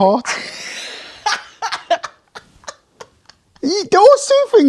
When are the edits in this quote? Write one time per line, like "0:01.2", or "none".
none